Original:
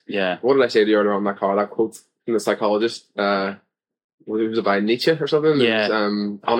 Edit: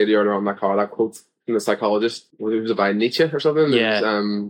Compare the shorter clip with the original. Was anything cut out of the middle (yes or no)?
yes